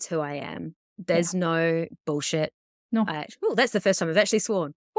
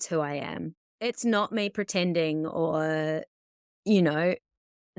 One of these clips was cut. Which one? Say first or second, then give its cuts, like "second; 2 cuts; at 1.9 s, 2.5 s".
second; 1 cut; at 1.0 s